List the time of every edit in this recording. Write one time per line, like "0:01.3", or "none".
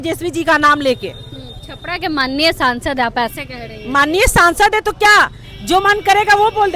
none